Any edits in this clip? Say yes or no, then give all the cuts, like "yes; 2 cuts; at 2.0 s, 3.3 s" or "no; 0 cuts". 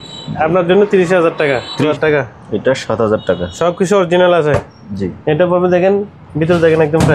yes; 1 cut; at 1.9 s